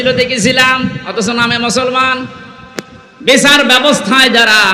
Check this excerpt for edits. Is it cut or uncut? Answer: uncut